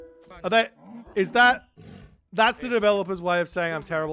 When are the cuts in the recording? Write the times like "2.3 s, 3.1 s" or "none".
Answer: none